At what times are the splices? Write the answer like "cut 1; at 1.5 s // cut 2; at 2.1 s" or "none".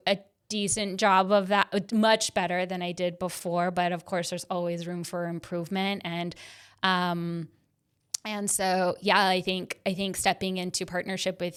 none